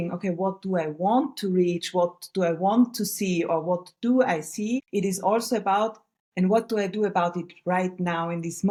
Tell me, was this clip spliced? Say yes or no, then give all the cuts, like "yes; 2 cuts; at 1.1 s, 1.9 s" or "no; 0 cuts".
no; 0 cuts